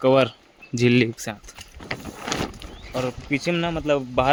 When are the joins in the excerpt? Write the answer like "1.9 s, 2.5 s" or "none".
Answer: none